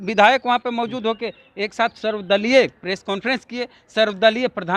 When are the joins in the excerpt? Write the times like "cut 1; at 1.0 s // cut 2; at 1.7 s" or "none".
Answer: none